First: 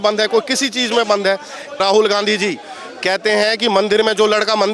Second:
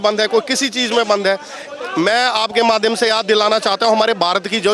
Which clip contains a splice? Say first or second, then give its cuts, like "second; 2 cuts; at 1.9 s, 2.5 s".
first; 1 cut; at 1.8 s